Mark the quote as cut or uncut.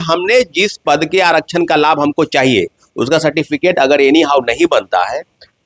uncut